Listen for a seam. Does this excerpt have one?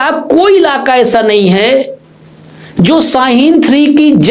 no; 0 cuts

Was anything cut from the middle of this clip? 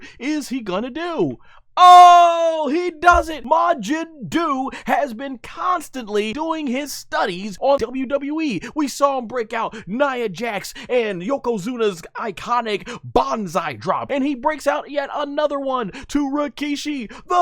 yes; 4 cuts; at 3.4 s, 6.3 s, 7.7 s, 14.0 s

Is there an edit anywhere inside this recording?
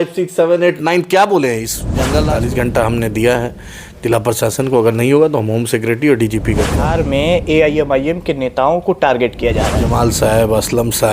yes; 3 cuts; at 2.3 s, 6.9 s, 9.9 s

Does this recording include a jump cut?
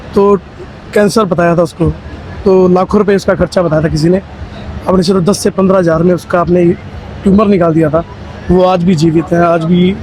no; 0 cuts

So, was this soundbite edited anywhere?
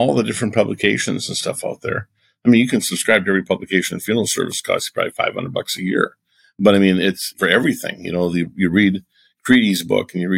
yes; 1 cut; at 7.3 s

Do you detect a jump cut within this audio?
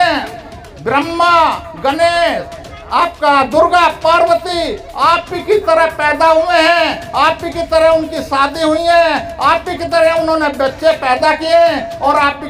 no; 0 cuts

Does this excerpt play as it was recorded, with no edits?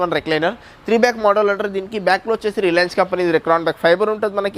yes; 0 cuts

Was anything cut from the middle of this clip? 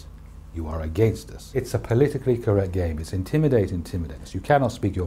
yes; 1 cut; at 1.7 s

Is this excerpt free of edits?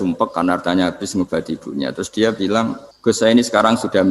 no; 1 cut; at 2.9 s

